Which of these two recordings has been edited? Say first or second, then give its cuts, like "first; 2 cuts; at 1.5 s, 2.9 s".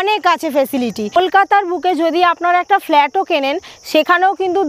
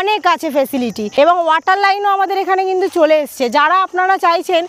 first; 1 cut; at 1.1 s